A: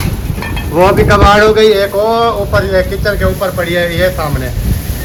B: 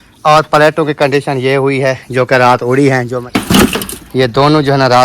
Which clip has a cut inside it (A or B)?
B